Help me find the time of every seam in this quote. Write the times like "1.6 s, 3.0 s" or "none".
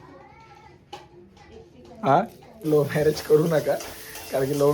2.7 s